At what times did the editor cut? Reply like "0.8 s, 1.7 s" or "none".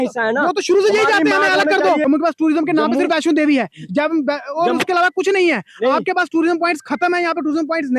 2.0 s